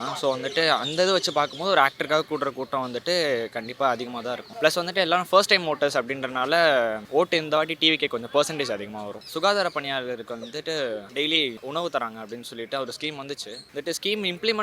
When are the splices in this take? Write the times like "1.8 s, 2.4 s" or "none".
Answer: 4.5 s, 7.0 s, 9.2 s, 11.3 s, 13.6 s